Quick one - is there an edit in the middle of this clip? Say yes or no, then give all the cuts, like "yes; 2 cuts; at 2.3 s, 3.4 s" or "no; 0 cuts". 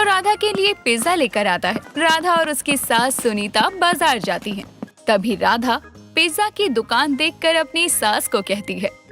yes; 1 cut; at 1.9 s